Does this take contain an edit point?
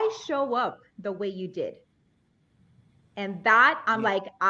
no; 0 cuts

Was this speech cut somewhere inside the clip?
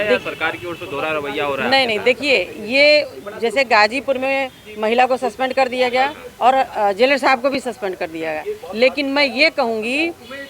no; 0 cuts

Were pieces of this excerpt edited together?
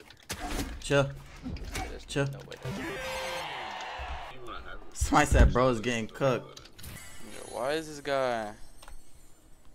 no; 0 cuts

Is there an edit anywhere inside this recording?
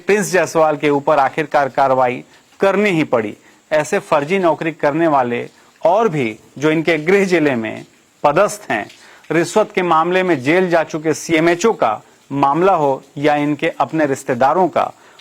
no; 0 cuts

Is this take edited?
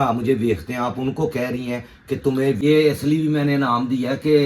yes; 1 cut; at 2.6 s

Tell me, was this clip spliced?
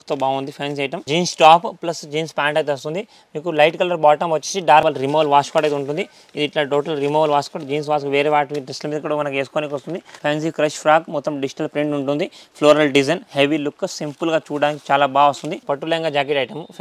yes; 4 cuts; at 1.0 s, 4.8 s, 10.1 s, 15.5 s

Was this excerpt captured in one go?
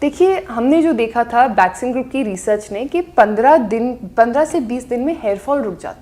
yes; 0 cuts

